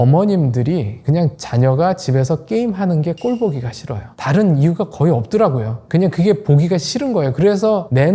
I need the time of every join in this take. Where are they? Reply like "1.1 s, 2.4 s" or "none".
none